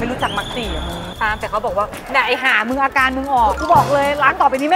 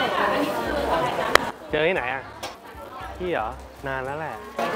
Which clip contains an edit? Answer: first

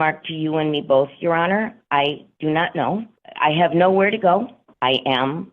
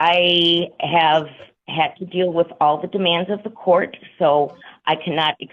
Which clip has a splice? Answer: first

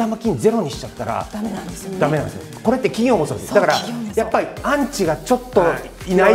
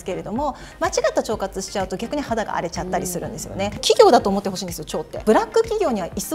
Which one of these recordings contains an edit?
second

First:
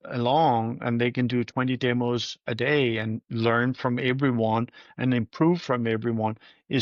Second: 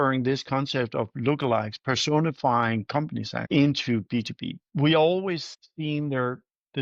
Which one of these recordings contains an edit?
second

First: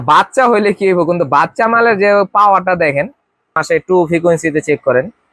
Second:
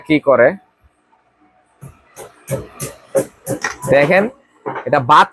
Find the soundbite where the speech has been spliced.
first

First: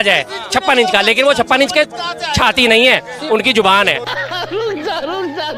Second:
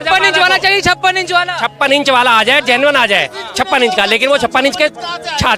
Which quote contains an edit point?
first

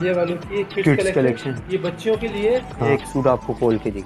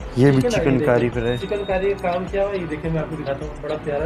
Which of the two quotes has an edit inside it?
first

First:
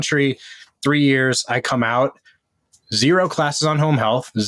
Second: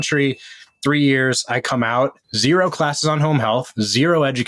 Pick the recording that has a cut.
second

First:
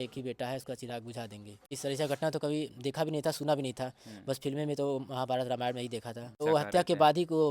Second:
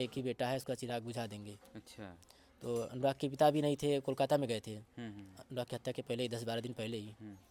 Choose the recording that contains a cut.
first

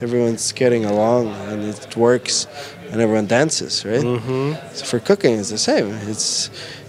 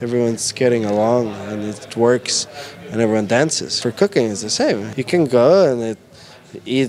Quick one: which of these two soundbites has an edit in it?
second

